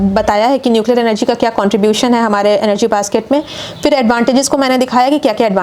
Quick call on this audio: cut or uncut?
uncut